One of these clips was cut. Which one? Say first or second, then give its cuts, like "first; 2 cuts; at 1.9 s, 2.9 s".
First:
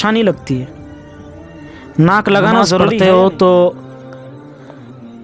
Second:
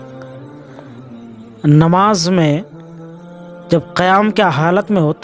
first; 1 cut; at 2.9 s